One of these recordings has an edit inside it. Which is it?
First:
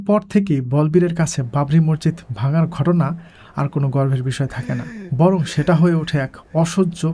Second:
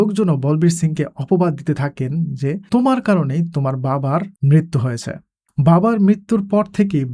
second; 2 cuts; at 2.6 s, 4.3 s

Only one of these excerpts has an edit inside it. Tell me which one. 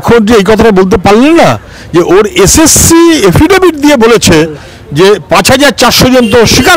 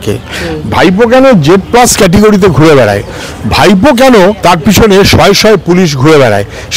second; 1 cut; at 4.4 s

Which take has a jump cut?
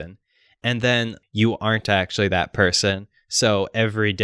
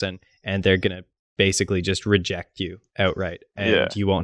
first; 1 cut; at 1.2 s

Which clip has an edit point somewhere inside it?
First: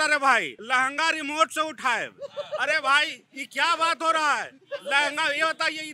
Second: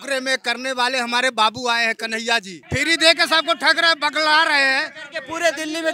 second; 1 cut; at 2.6 s

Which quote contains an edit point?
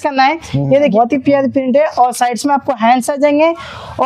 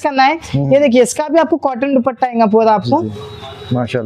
first; 1 cut; at 0.9 s

